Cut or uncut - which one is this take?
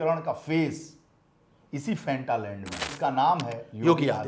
cut